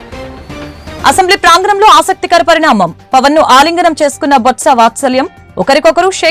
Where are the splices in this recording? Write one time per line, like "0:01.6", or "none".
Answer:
0:01.0